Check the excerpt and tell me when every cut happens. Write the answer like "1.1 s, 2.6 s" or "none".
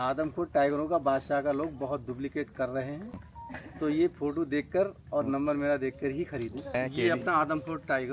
3.1 s, 6.7 s